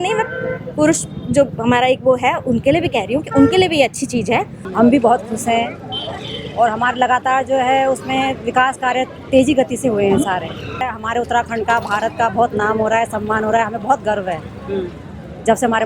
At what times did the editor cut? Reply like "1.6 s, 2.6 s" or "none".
4.6 s, 10.8 s